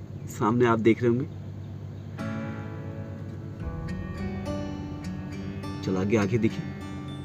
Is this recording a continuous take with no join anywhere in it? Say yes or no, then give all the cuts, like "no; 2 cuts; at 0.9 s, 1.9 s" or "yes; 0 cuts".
yes; 0 cuts